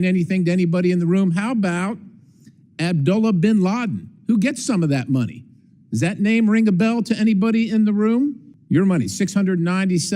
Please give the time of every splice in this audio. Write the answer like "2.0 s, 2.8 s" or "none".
8.5 s